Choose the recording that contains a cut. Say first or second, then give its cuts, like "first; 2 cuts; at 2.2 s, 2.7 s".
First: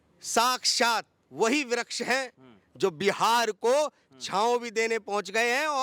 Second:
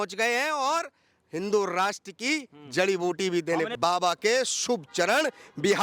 second; 1 cut; at 3.7 s